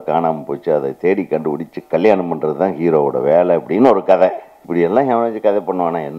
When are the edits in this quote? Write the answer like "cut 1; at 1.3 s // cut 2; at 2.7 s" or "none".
cut 1; at 4.5 s